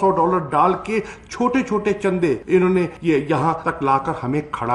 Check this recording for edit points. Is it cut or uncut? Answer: uncut